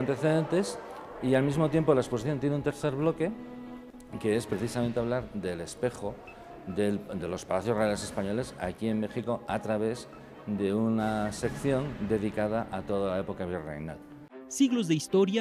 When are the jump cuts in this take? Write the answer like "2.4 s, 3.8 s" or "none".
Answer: 2.6 s